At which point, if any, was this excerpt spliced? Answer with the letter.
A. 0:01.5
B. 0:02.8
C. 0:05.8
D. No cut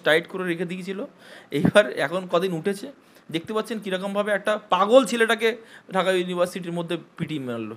D